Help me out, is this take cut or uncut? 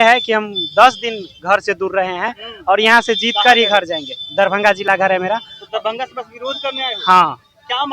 uncut